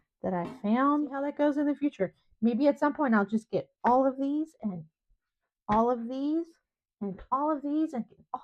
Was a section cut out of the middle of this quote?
yes; 1 cut; at 1.2 s

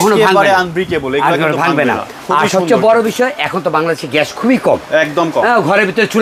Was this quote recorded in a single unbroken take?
yes; 0 cuts

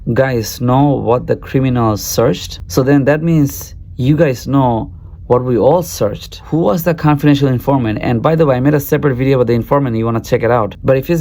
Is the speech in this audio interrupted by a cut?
yes; 1 cut; at 6.4 s

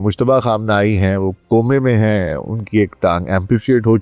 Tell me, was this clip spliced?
no; 0 cuts

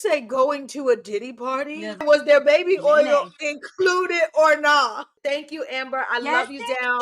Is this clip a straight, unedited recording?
no; 2 cuts; at 2.0 s, 5.2 s

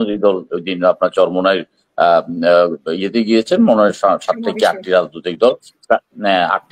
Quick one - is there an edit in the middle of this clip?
no; 0 cuts

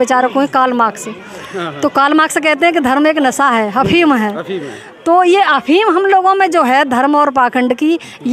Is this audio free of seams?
yes; 0 cuts

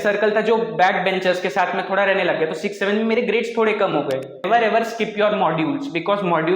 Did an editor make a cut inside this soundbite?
yes; 1 cut; at 4.4 s

